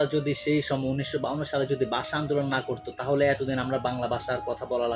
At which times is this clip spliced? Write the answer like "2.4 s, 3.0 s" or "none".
none